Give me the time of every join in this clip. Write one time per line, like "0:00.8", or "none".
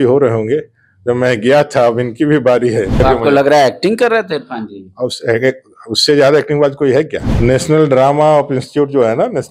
0:03.0
0:07.2

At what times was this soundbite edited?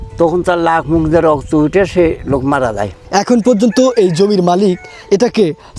0:02.9

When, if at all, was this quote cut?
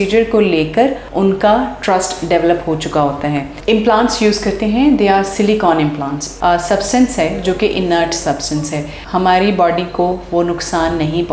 0:03.5
0:06.4

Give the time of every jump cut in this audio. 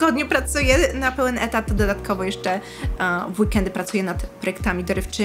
none

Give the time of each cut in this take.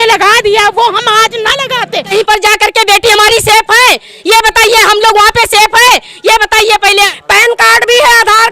0:02.1
0:07.2

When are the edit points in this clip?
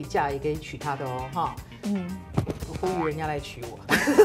none

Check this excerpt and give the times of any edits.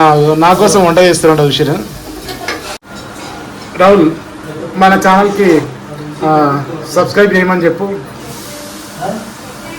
0:02.9

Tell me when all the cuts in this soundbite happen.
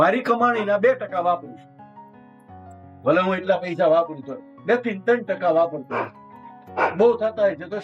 none

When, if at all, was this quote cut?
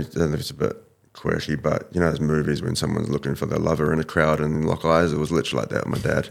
none

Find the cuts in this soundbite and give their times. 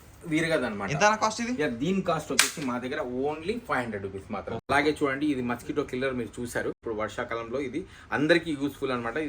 0:04.6
0:06.8

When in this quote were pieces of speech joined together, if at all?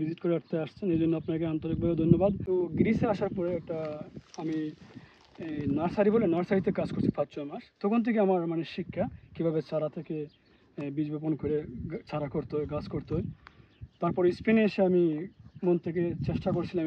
0:02.4

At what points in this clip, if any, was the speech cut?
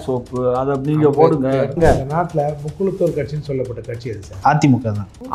0:01.8

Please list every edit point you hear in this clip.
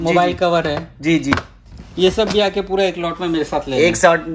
none

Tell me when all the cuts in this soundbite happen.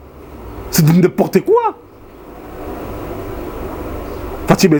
none

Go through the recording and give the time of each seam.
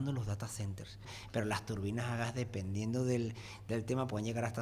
0:01.1

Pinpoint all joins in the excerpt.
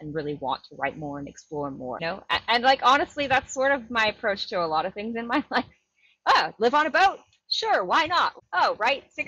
0:02.0
0:08.3

